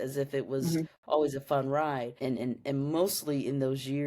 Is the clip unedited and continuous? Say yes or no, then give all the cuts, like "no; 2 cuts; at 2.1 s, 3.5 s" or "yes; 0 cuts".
no; 1 cut; at 2.1 s